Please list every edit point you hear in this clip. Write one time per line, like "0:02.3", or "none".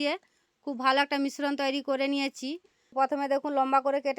0:02.9